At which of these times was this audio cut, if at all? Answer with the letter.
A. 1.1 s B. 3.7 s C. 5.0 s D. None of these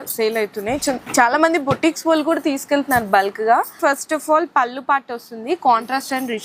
D